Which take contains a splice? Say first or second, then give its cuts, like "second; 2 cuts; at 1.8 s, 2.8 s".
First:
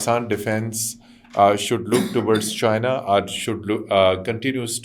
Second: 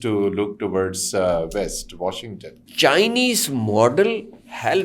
second; 1 cut; at 2.6 s